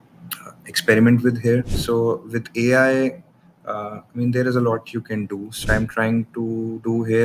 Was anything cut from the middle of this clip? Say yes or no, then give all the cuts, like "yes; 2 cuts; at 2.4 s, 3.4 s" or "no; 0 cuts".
yes; 2 cuts; at 1.7 s, 5.6 s